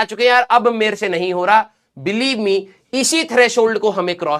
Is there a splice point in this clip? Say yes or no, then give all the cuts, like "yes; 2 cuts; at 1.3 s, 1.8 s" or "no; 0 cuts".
no; 0 cuts